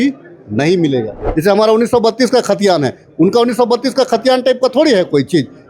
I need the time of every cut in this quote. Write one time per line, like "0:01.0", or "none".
0:01.3